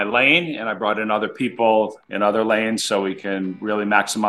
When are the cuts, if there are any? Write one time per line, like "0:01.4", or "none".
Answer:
none